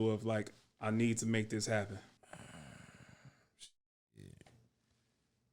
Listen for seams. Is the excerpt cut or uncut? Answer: cut